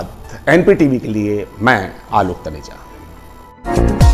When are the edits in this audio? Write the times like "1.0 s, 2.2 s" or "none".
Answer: none